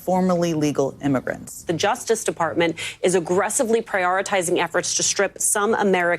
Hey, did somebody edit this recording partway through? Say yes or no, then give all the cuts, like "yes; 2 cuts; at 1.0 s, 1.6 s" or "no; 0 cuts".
yes; 1 cut; at 1.7 s